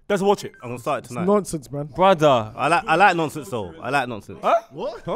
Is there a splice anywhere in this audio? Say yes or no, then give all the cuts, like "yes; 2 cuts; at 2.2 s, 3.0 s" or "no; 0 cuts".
yes; 1 cut; at 4.2 s